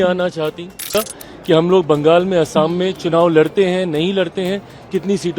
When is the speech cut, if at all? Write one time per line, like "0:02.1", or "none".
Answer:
0:00.9